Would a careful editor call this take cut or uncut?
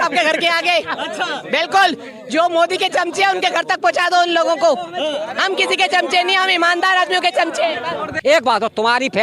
cut